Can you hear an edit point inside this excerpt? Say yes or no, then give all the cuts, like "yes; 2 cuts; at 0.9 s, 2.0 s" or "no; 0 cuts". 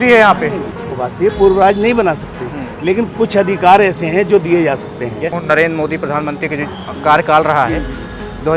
yes; 1 cut; at 5.3 s